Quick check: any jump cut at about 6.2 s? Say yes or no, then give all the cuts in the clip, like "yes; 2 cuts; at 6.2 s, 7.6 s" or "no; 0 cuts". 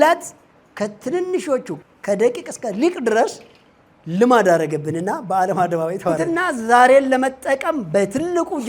yes; 2 cuts; at 1.7 s, 6.2 s